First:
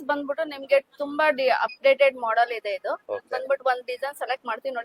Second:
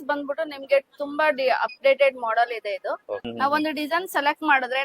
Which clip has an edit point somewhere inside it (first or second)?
second